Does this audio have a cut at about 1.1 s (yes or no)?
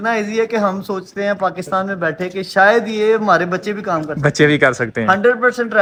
no